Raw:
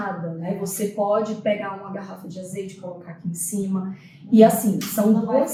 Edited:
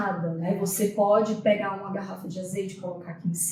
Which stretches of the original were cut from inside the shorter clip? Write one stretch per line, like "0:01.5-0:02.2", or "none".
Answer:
none